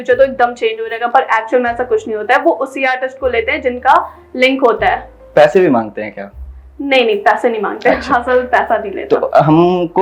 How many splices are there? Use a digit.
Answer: 0